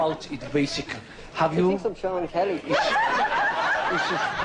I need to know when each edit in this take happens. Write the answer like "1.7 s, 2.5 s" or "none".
1.5 s